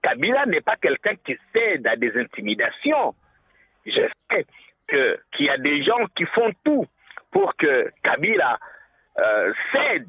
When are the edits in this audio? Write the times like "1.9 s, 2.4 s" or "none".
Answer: none